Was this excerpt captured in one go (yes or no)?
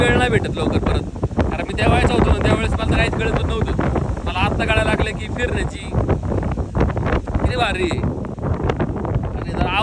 yes